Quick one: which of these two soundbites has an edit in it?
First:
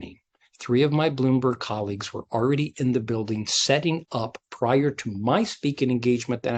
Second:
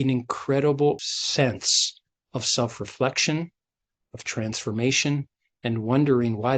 second; 1 cut; at 1.0 s

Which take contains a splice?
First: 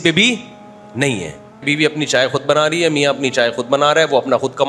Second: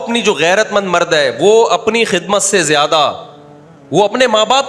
first; 1 cut; at 1.6 s

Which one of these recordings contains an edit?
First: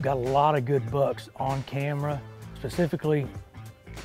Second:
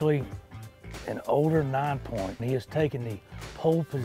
second; 1 cut; at 2.4 s

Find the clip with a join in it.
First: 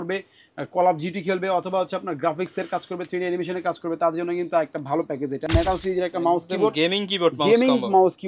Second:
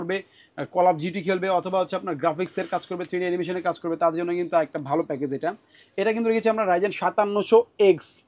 first; 1 cut; at 5.5 s

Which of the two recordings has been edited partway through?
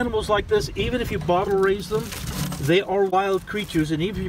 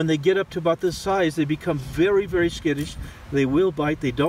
first; 1 cut; at 3.1 s

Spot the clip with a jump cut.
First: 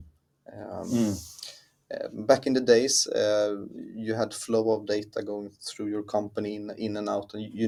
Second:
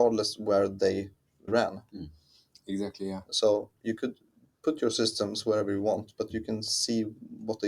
second; 1 cut; at 1.5 s

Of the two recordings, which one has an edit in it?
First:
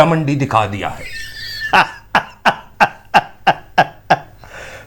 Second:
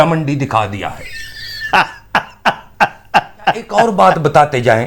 second; 1 cut; at 3.8 s

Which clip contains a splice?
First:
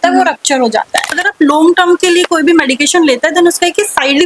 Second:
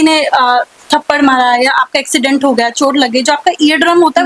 first; 1 cut; at 1.1 s

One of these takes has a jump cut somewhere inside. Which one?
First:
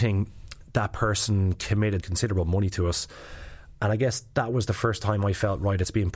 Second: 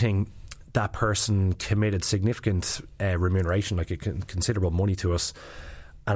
first; 1 cut; at 2.0 s

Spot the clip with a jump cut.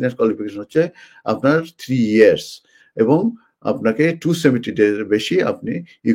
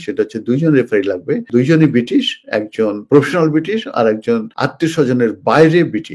second; 3 cuts; at 1.5 s, 3.0 s, 4.5 s

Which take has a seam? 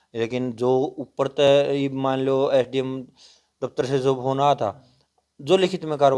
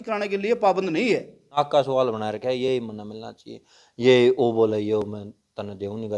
second; 1 cut; at 1.6 s

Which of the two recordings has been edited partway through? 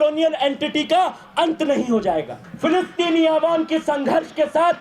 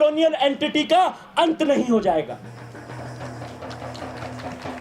first; 1 cut; at 2.4 s

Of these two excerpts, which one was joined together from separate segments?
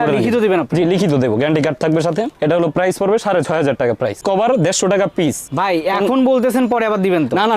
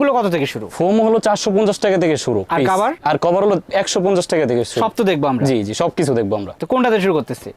first; 2 cuts; at 4.2 s, 5.4 s

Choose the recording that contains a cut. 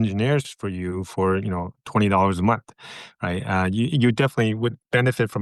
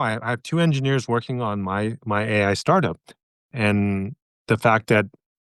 second; 1 cut; at 3.5 s

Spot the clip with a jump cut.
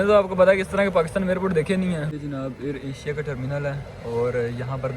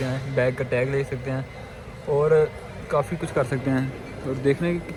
first; 1 cut; at 2.1 s

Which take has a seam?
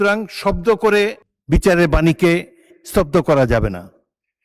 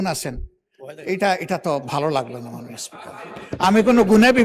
first; 1 cut; at 1.3 s

